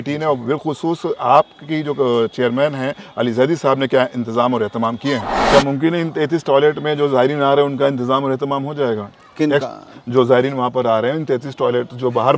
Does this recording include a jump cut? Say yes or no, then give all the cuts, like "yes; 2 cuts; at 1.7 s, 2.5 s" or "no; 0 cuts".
yes; 1 cut; at 5.4 s